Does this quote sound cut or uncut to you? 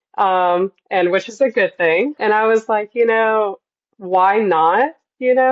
cut